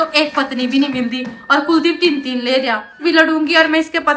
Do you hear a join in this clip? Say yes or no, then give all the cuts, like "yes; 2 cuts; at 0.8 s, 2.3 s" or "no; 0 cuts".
yes; 1 cut; at 3.0 s